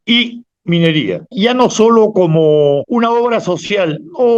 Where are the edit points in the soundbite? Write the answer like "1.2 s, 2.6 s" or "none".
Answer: 1.3 s, 2.9 s